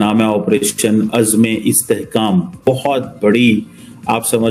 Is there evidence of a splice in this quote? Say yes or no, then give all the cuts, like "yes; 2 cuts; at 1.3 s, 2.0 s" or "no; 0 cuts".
yes; 1 cut; at 2.6 s